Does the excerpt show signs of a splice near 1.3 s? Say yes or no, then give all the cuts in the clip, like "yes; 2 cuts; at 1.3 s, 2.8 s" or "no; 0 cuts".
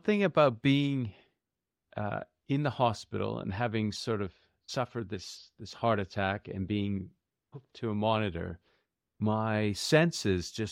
no; 0 cuts